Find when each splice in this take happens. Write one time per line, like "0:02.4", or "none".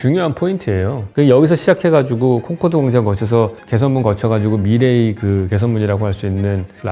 0:01.0